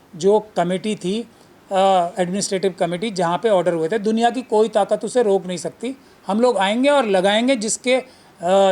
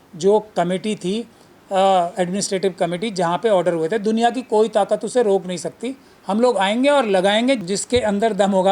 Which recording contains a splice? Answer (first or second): second